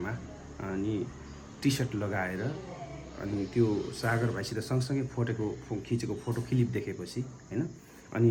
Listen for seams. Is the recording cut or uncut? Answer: uncut